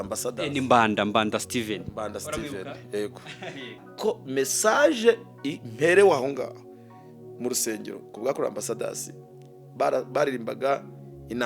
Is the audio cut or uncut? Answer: cut